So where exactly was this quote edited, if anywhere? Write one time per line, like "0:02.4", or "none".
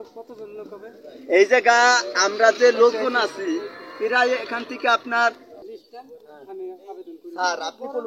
0:05.5